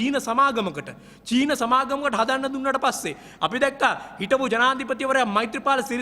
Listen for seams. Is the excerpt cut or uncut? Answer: uncut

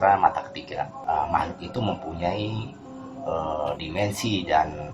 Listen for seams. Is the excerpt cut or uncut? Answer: cut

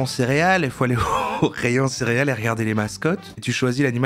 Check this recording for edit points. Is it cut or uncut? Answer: uncut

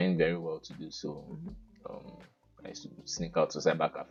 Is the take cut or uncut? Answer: uncut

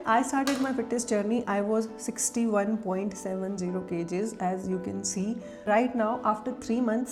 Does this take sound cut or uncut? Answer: uncut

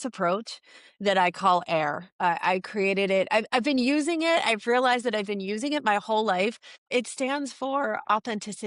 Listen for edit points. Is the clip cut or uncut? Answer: uncut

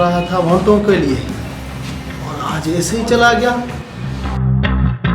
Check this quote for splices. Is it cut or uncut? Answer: uncut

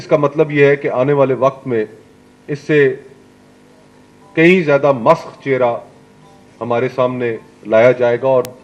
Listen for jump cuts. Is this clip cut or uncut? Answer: uncut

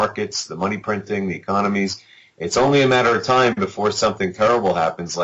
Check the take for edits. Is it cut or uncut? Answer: uncut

